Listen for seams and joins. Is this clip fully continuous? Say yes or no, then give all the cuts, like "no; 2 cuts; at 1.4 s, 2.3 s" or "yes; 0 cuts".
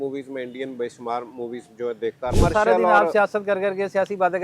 no; 1 cut; at 2.3 s